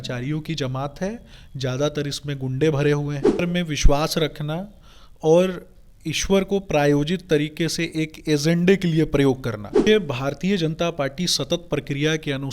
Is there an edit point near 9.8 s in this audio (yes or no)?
yes